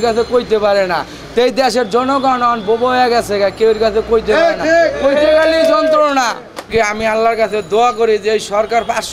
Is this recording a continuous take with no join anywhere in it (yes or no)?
yes